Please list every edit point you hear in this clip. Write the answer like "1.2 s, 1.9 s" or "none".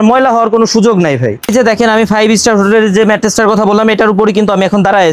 1.4 s

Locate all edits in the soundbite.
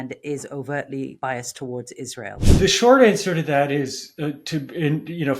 1.1 s, 2.4 s

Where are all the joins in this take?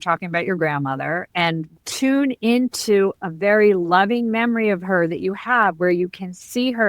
1.7 s

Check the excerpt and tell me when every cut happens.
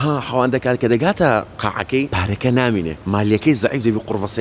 2.1 s, 3.0 s

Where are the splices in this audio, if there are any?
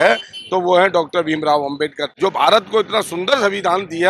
2.0 s

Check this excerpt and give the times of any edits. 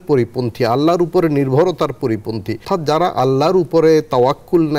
2.6 s

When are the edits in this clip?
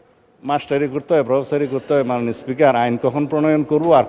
none

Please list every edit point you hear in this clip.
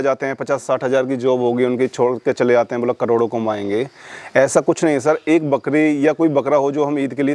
none

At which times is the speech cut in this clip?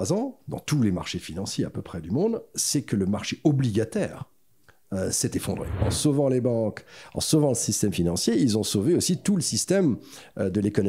5.9 s

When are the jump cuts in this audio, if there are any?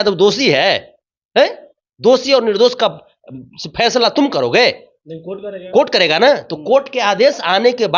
none

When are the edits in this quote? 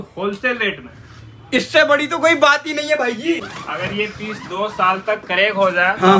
3.6 s

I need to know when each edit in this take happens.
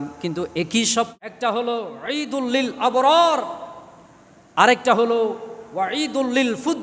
1.2 s

